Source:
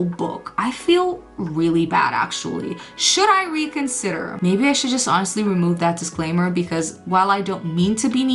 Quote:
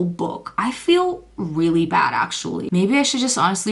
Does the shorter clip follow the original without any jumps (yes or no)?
no